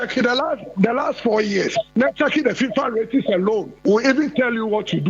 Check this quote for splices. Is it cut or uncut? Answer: cut